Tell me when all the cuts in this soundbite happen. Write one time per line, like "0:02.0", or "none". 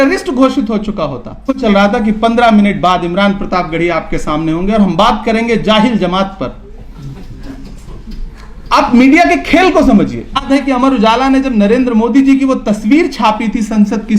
0:01.6
0:10.4